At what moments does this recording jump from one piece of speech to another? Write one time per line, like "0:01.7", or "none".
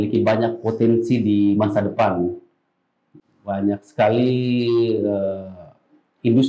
none